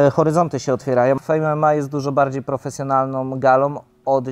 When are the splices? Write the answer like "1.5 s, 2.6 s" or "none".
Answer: 1.2 s